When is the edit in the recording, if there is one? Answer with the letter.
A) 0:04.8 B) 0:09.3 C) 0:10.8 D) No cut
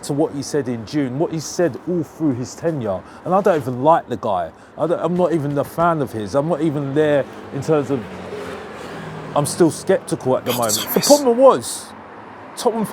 C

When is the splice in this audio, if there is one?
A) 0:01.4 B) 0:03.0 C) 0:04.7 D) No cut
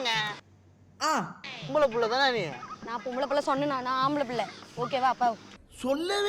A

